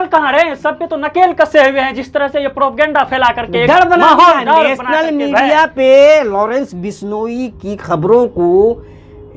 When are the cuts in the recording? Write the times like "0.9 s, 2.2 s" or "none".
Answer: none